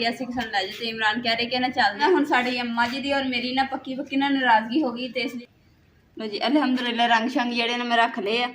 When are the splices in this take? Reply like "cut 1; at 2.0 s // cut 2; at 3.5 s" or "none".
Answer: cut 1; at 2.0 s // cut 2; at 5.4 s